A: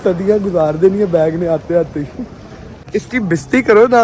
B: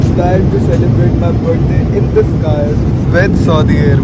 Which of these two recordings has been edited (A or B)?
A